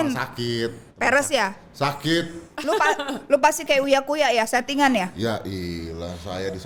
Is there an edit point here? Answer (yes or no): no